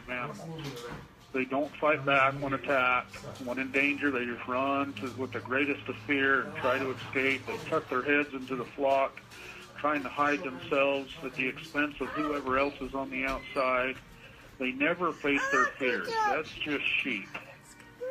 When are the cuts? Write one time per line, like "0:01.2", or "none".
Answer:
none